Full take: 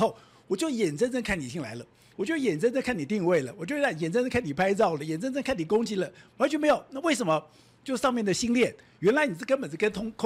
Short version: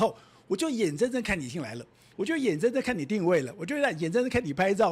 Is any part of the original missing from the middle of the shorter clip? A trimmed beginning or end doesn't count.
no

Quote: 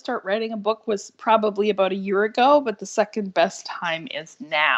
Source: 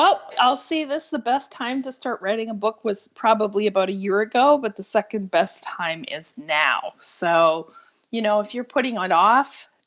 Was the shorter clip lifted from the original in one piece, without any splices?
yes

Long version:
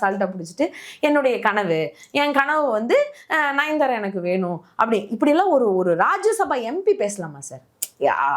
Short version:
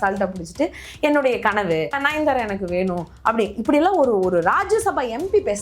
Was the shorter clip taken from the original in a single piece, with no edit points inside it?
no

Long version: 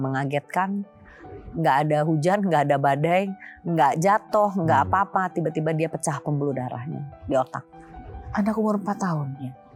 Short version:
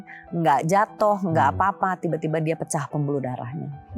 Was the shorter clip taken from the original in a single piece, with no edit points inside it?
yes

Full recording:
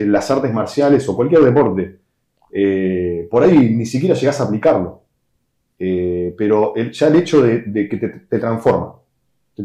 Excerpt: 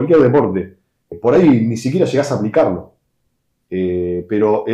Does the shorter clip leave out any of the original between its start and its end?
yes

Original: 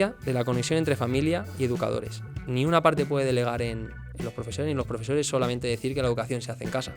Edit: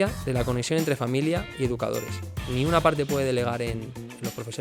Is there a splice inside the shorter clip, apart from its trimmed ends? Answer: no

